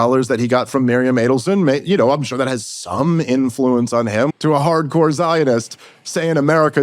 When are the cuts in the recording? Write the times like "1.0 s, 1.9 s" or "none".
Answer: 4.3 s